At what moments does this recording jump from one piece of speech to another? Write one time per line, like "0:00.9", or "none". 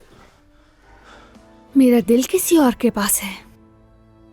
0:01.3